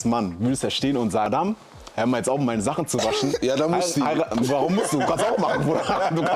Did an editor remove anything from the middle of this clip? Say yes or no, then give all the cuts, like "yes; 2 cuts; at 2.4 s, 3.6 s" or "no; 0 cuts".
yes; 2 cuts; at 1.3 s, 3.4 s